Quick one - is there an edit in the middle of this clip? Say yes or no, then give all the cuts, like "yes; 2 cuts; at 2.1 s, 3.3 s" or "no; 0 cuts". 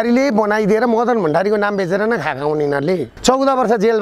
yes; 1 cut; at 3.1 s